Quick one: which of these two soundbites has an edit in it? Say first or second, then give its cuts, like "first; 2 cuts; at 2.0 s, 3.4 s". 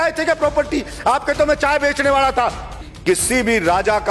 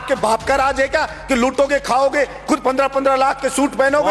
first; 1 cut; at 2.9 s